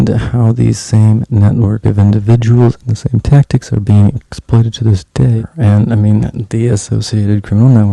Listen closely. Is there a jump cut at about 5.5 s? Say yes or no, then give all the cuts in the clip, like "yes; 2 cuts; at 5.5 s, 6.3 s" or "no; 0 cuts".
yes; 1 cut; at 5.5 s